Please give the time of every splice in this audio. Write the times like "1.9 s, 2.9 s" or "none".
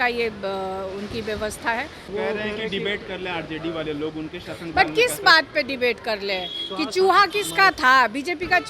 2.1 s